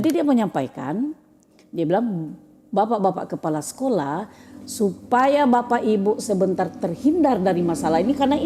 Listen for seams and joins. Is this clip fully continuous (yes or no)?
yes